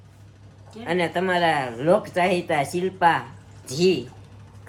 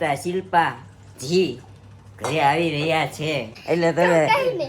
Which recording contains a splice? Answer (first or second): second